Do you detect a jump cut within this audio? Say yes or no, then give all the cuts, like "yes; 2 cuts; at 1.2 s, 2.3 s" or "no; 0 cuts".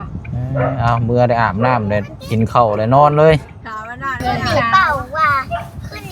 yes; 1 cut; at 4.2 s